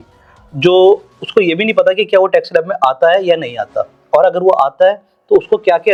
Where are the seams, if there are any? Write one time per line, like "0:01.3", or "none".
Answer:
none